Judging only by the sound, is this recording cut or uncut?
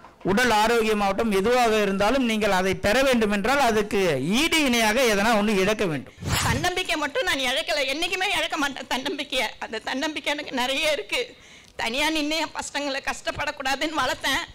cut